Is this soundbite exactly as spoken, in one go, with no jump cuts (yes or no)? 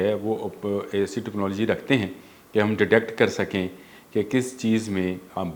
yes